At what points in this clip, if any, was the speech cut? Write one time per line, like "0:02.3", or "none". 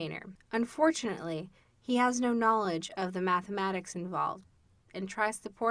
none